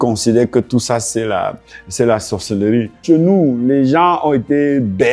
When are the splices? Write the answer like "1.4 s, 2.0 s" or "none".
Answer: 2.9 s